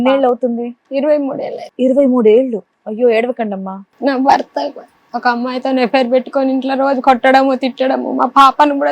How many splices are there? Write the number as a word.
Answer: one